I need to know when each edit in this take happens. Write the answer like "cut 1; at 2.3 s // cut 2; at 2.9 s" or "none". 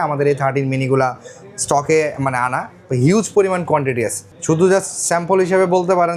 none